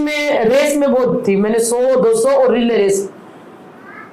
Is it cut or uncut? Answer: uncut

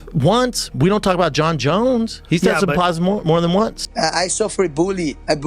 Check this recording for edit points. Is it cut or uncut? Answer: cut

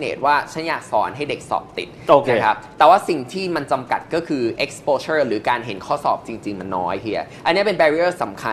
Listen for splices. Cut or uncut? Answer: uncut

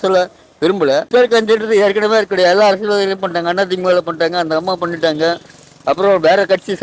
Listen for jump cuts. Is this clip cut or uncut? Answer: cut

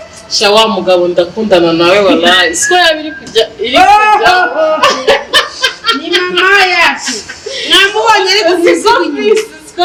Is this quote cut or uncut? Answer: uncut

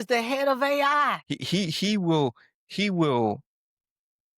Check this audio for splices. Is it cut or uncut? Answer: cut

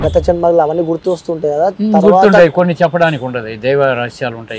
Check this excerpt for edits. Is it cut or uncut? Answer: uncut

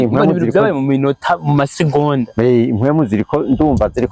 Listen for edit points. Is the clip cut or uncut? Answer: uncut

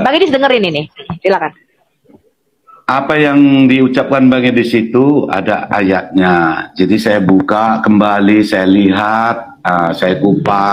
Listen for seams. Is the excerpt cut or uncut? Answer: uncut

